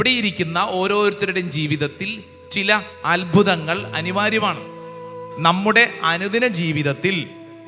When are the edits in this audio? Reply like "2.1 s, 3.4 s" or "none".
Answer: 5.2 s